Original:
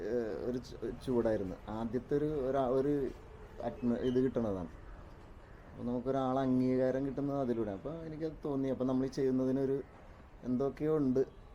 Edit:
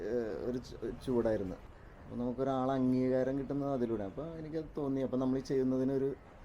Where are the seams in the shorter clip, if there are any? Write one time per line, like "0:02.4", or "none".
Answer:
0:01.6

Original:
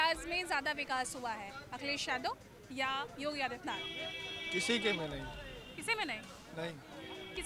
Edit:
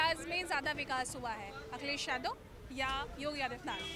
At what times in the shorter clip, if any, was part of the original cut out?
none

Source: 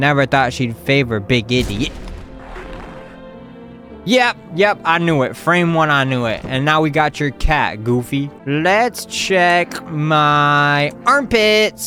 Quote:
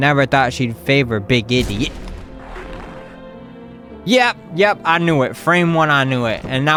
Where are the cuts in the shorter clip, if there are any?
none

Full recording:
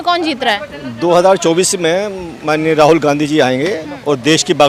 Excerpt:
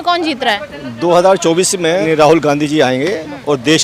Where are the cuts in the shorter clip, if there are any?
0:02.0

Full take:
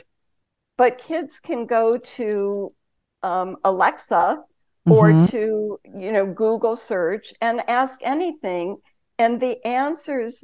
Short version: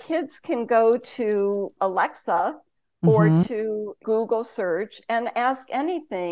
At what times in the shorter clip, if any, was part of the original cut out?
0:01.7
0:04.0

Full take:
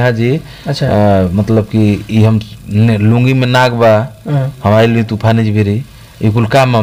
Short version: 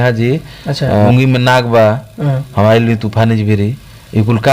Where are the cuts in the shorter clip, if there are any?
0:01.1

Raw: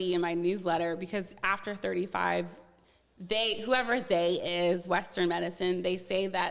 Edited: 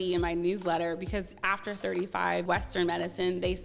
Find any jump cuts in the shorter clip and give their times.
0:02.4

